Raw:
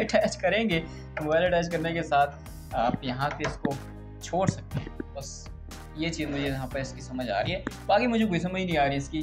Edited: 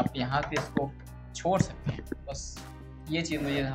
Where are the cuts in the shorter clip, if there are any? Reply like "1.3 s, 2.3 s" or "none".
none